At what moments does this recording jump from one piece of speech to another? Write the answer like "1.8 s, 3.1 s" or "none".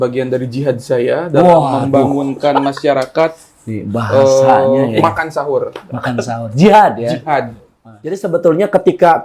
8.2 s

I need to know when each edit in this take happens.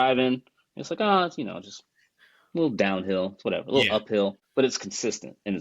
4.4 s

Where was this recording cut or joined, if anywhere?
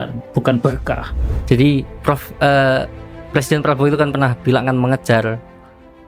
1.2 s

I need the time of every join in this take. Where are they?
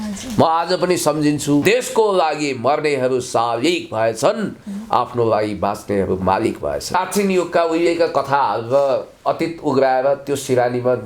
1.6 s, 7.0 s

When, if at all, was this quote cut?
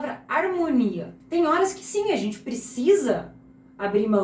1.1 s

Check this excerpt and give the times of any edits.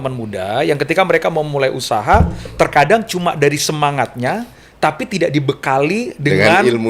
none

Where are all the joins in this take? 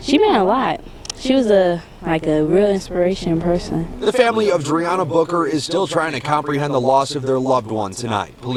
none

